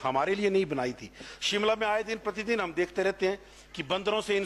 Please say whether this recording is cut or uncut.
uncut